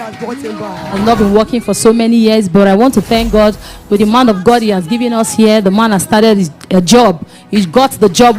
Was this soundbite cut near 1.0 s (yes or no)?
yes